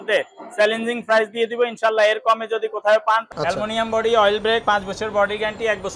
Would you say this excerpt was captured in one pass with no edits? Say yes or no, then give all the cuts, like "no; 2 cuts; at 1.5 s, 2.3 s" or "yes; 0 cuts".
no; 1 cut; at 3.2 s